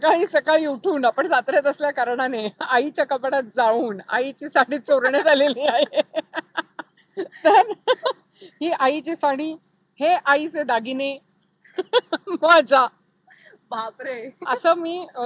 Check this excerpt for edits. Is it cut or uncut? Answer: uncut